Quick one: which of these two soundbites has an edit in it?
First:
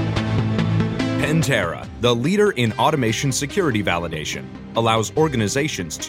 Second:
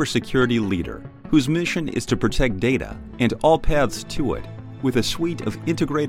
first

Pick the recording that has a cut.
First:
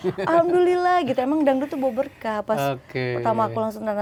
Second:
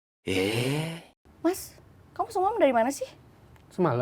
second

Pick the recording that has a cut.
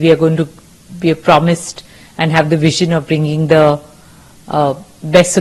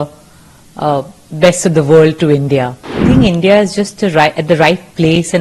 second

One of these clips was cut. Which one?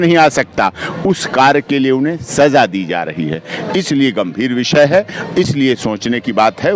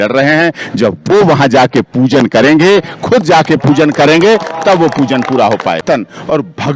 second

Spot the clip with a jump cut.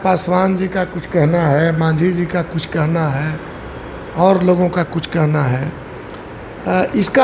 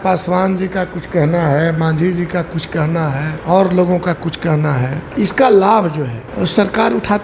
second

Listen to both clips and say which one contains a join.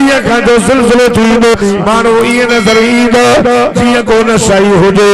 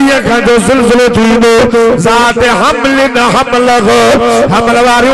first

